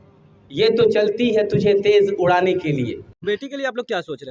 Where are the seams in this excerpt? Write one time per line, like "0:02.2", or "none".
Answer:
0:03.1